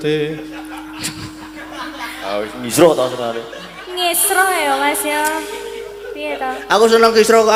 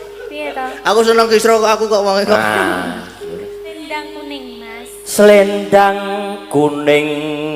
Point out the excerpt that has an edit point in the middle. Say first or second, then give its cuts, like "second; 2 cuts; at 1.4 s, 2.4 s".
second; 1 cut; at 3.8 s